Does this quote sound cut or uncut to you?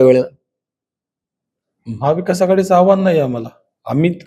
uncut